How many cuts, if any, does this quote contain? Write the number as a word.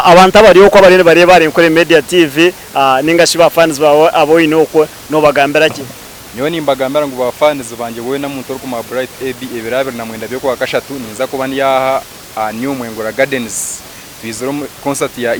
zero